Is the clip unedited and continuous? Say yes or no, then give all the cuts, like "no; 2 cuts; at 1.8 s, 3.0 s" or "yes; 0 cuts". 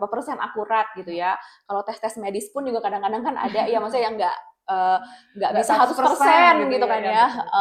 yes; 0 cuts